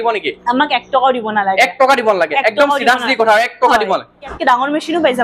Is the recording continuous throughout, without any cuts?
no; 1 cut; at 4.3 s

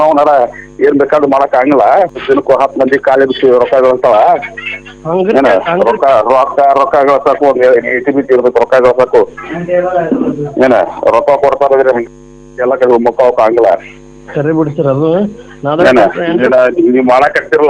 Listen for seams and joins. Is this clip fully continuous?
no; 1 cut; at 2.2 s

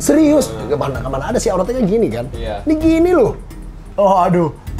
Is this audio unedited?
no; 1 cut; at 3.8 s

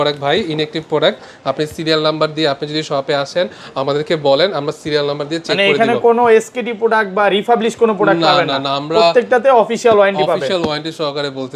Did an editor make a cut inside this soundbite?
no; 0 cuts

